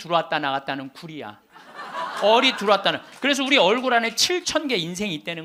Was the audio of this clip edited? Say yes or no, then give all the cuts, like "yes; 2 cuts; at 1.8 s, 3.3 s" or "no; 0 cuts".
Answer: no; 0 cuts